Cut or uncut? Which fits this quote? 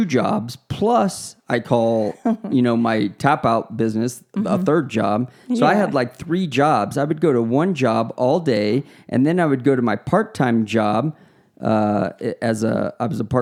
uncut